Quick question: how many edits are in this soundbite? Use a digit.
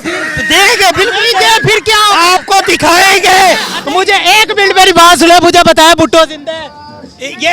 1